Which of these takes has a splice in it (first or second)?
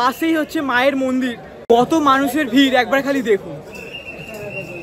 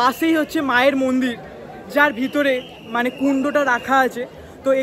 first